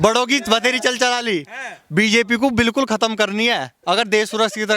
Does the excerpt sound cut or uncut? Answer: uncut